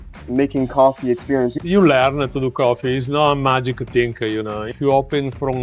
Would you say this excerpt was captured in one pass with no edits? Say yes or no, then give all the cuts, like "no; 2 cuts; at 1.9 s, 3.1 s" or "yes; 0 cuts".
no; 2 cuts; at 1.6 s, 4.6 s